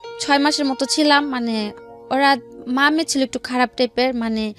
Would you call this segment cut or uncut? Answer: uncut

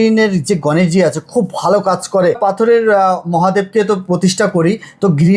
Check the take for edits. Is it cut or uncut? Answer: cut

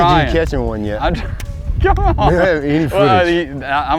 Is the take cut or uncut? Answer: uncut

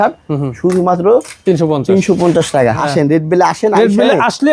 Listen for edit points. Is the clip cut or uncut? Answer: cut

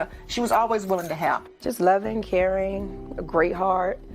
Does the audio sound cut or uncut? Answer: cut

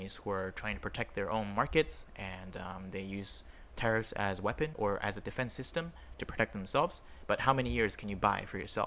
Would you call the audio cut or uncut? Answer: uncut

